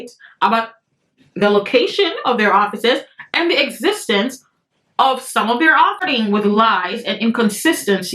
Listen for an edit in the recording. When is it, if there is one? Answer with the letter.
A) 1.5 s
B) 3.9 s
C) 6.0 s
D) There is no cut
C